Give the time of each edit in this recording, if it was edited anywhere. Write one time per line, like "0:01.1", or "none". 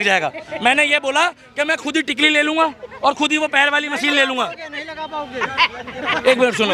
none